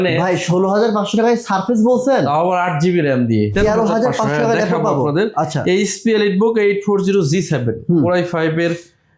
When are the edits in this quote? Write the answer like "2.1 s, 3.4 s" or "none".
3.5 s